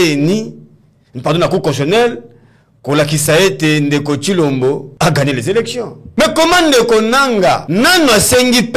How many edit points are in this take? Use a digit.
3